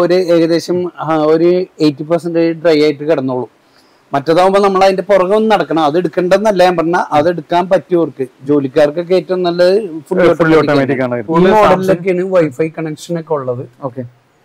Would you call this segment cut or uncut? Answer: cut